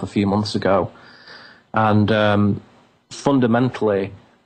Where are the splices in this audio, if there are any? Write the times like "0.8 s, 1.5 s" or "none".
none